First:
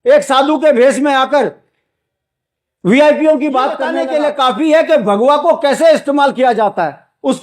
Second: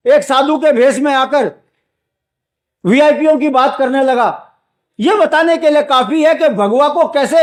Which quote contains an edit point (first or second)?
first